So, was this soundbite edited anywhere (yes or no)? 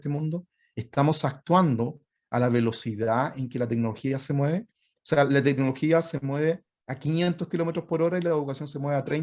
no